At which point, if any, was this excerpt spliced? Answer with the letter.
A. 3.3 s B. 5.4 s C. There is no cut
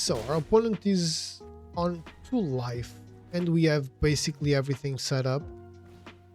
B